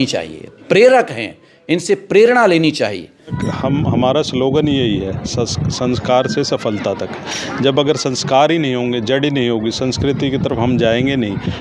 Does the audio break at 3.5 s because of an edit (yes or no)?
yes